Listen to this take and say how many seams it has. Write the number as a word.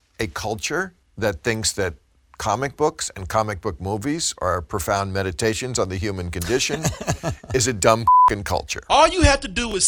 two